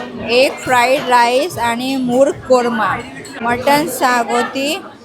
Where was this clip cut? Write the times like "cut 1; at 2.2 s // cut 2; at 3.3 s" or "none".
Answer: cut 1; at 3.3 s